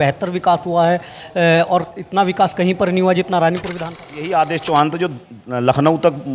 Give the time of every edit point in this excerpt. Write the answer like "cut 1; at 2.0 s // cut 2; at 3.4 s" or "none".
cut 1; at 3.7 s